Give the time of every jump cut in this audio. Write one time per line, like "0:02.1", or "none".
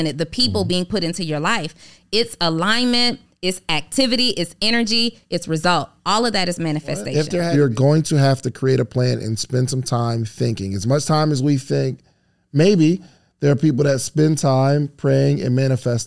0:07.4